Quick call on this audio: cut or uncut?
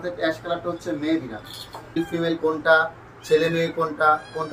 cut